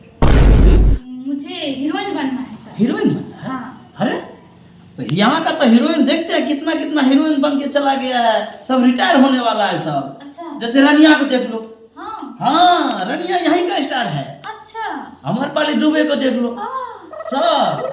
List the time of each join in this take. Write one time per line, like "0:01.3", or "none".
0:01.0